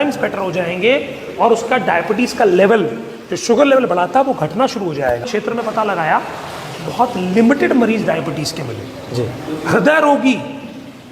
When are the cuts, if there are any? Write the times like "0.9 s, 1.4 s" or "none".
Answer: 5.3 s